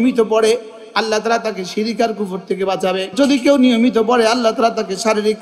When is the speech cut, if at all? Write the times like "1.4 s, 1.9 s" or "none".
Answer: 3.1 s